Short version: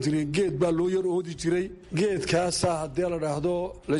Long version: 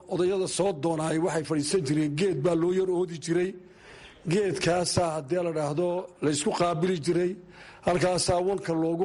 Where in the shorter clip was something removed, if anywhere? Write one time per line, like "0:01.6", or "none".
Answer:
0:01.8